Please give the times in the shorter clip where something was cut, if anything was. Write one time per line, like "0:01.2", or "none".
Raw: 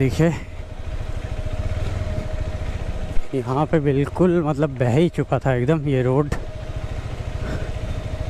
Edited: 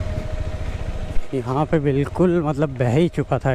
none